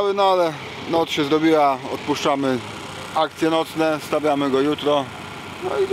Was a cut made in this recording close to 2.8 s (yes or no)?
no